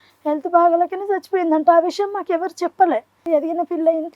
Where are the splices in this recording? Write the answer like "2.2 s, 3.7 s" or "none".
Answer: 3.2 s